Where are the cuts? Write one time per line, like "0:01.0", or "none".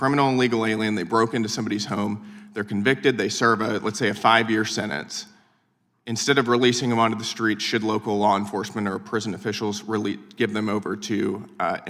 none